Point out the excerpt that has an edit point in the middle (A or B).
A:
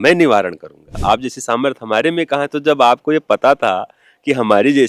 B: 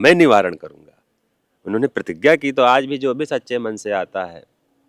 A